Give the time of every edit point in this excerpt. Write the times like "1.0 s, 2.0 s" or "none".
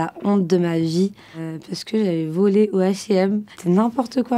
none